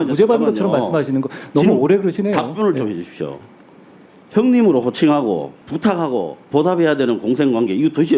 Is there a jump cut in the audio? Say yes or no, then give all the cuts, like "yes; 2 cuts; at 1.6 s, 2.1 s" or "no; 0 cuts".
yes; 1 cut; at 5.6 s